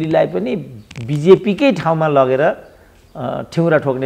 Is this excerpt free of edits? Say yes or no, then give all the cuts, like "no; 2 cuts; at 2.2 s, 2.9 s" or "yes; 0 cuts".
yes; 0 cuts